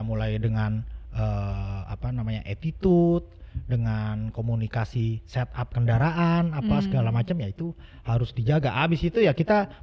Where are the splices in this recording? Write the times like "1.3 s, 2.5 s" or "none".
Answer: none